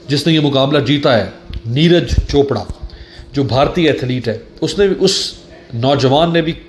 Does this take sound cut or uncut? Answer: uncut